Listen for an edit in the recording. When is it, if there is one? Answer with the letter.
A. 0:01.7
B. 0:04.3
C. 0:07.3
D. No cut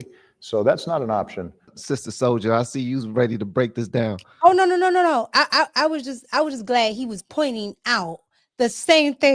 A